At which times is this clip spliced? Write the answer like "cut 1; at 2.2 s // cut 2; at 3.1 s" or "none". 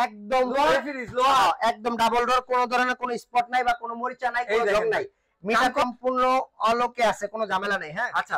cut 1; at 5.8 s